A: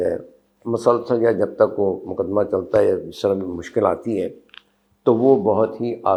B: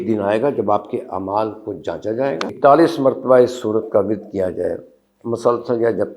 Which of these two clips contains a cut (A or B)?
B